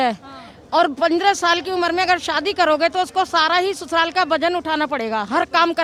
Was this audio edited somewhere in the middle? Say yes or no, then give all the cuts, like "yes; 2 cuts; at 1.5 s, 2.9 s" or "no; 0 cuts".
no; 0 cuts